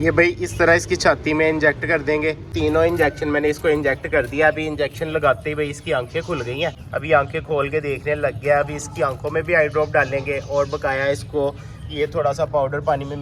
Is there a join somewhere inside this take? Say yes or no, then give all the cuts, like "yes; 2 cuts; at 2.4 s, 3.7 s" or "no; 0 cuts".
no; 0 cuts